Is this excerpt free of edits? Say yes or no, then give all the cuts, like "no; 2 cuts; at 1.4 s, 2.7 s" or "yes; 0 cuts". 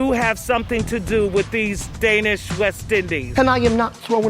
no; 1 cut; at 3.2 s